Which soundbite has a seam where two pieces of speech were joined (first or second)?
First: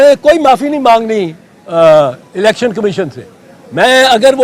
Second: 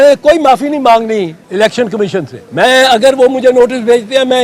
second